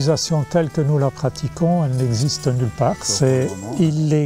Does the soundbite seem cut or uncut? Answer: cut